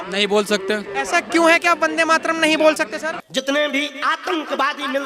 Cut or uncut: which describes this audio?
cut